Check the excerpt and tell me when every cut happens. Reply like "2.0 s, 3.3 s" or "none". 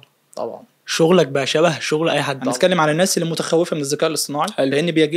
2.4 s